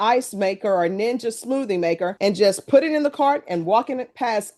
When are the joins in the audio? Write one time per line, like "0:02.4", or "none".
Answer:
none